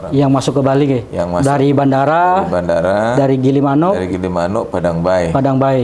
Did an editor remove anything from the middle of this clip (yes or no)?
no